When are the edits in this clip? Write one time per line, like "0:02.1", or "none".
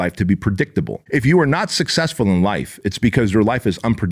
0:01.0